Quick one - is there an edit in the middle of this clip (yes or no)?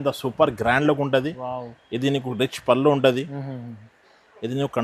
no